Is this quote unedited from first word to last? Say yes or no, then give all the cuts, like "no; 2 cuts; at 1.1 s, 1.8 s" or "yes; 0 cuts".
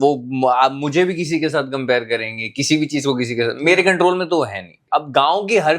no; 1 cut; at 4.8 s